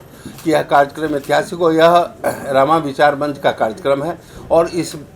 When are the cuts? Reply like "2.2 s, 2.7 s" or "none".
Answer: none